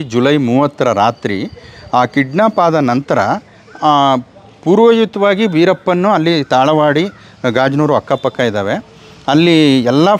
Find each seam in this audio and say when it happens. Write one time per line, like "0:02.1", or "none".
none